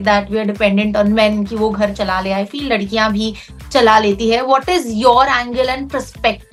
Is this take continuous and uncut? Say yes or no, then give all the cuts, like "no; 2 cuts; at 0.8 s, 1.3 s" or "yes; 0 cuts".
yes; 0 cuts